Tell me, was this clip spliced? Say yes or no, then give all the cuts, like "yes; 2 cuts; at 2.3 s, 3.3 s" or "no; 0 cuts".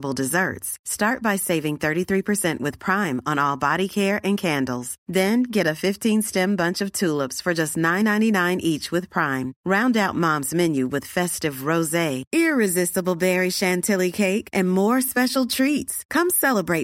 no; 0 cuts